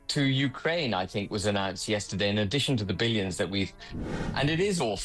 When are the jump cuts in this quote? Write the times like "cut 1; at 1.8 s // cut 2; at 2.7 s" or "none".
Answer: cut 1; at 3.9 s